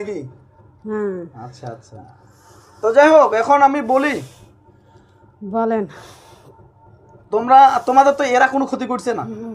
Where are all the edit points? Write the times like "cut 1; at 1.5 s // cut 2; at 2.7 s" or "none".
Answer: none